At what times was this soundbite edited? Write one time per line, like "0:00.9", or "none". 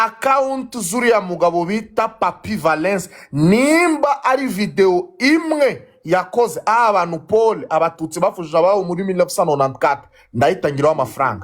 none